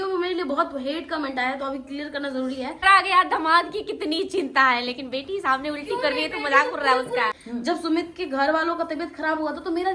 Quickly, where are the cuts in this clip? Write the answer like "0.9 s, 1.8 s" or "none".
2.8 s, 7.4 s